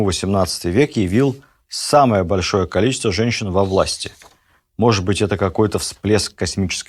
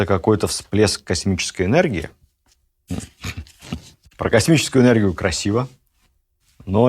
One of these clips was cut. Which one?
second; 1 cut; at 4.0 s

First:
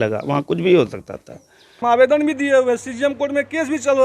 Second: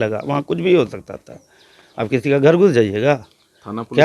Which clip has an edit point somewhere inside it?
first; 1 cut; at 1.7 s

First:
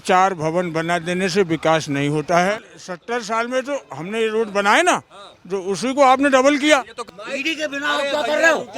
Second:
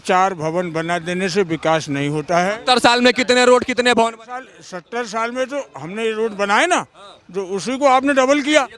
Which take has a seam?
first; 2 cuts; at 2.6 s, 6.9 s

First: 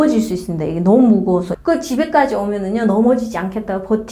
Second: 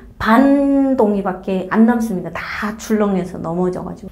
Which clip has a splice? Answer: first; 1 cut; at 1.5 s

